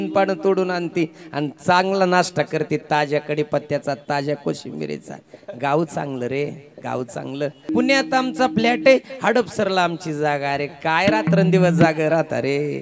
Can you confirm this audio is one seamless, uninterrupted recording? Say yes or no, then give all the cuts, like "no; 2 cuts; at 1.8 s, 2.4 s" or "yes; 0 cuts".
no; 1 cut; at 7.7 s